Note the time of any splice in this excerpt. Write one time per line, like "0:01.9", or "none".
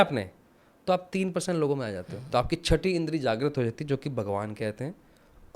0:02.1